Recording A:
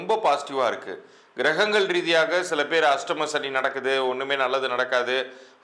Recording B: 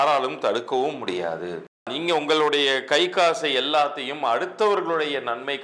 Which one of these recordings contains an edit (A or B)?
B